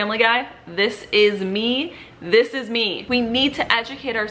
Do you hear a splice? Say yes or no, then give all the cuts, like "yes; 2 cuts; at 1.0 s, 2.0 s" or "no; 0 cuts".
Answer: yes; 1 cut; at 3.0 s